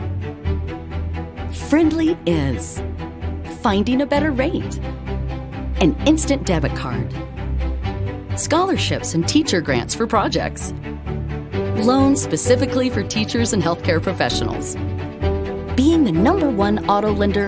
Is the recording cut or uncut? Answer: uncut